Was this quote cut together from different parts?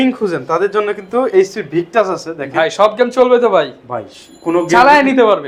no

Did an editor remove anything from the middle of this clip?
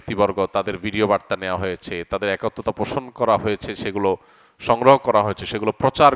no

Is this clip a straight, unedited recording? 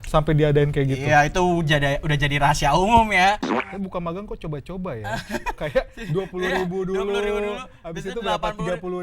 no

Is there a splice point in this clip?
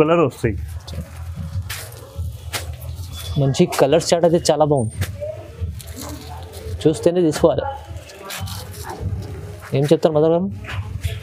no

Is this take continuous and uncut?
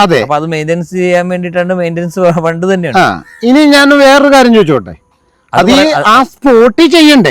yes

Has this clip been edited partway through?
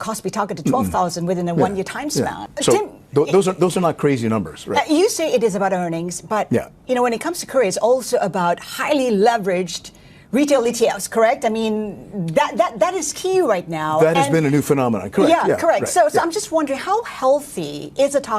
yes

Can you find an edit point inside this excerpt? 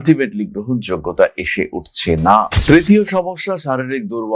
yes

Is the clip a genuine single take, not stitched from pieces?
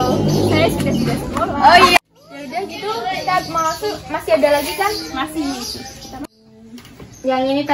no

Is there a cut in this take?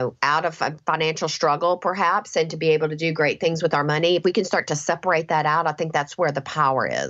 no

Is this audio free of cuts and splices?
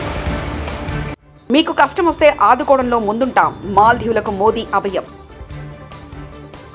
no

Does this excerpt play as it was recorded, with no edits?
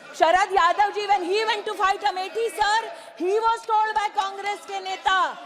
yes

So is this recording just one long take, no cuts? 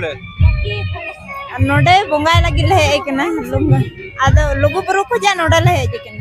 yes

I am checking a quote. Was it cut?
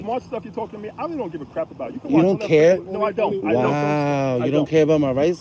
no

